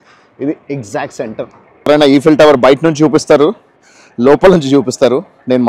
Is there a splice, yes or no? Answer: yes